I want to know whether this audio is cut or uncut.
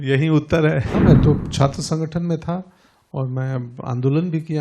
cut